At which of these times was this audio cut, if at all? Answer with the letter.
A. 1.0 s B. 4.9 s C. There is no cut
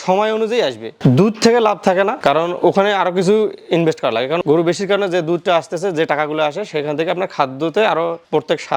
A